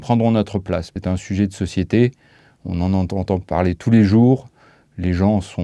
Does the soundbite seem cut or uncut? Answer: cut